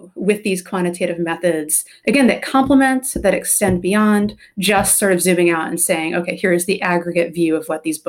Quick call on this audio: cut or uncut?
cut